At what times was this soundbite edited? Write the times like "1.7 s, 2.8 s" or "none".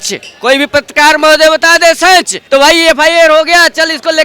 2.4 s